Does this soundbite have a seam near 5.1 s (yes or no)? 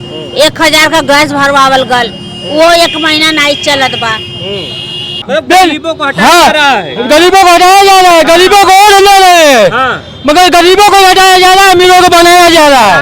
yes